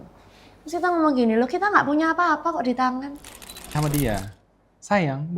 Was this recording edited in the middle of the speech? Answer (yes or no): yes